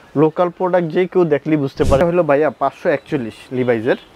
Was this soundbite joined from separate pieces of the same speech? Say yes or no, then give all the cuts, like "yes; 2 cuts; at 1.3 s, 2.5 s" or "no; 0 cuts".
yes; 1 cut; at 2.0 s